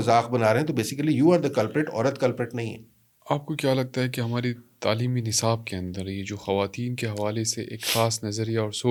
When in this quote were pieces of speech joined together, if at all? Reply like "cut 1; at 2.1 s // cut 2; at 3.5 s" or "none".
none